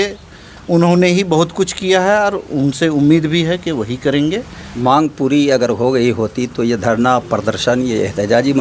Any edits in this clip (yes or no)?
yes